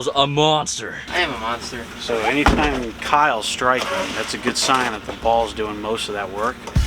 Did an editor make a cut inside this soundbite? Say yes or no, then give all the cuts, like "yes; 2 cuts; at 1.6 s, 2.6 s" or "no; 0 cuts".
yes; 1 cut; at 1.0 s